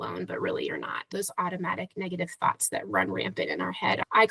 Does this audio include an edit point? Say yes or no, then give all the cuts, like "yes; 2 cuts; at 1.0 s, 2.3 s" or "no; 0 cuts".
yes; 1 cut; at 1.1 s